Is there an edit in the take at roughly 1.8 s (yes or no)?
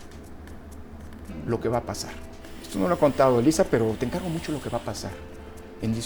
no